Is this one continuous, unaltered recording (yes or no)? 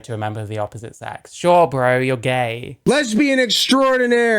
no